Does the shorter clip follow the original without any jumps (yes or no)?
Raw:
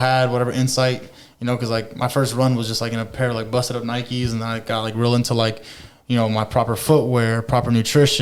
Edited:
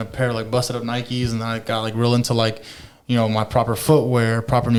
yes